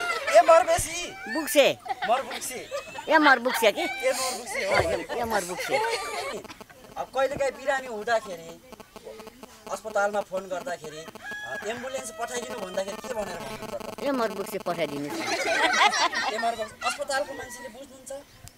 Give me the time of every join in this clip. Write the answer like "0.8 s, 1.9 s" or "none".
none